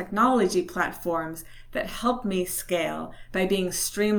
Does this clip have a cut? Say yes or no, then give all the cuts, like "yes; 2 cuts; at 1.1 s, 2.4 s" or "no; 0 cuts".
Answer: no; 0 cuts